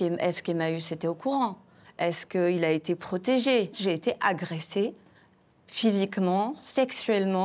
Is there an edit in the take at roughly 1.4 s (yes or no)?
no